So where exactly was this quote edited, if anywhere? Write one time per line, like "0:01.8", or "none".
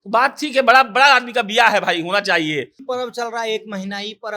0:02.8